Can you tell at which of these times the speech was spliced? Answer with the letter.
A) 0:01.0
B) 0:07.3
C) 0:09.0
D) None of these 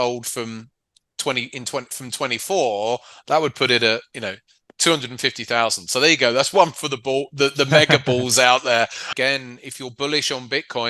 C